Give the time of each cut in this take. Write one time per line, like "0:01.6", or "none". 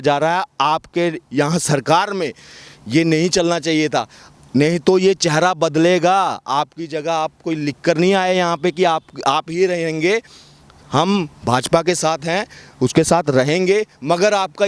none